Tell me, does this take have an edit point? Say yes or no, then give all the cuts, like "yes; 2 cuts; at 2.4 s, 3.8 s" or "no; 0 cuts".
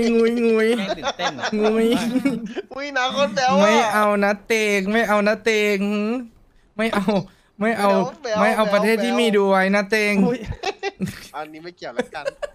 no; 0 cuts